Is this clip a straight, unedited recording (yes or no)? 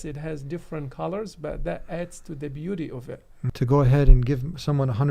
no